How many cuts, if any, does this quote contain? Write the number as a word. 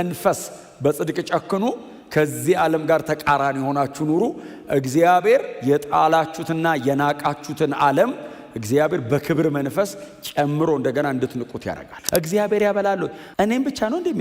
two